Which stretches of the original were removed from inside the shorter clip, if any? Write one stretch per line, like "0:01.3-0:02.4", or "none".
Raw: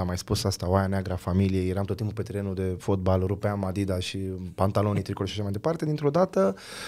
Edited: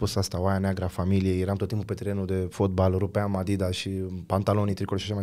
none